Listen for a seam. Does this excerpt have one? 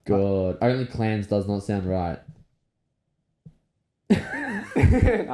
no; 0 cuts

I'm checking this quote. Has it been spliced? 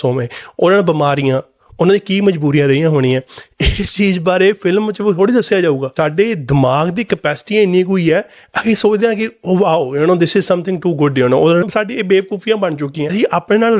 yes; 3 cuts; at 5.9 s, 11.6 s, 13.1 s

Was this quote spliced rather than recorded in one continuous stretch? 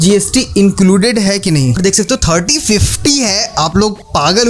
yes; 1 cut; at 1.8 s

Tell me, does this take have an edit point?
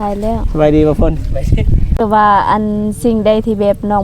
yes; 1 cut; at 2.0 s

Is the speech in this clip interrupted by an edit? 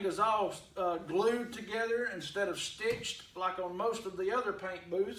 no; 0 cuts

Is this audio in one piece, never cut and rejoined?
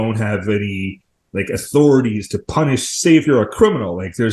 yes; 0 cuts

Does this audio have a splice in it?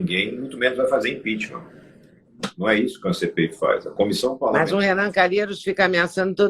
no; 0 cuts

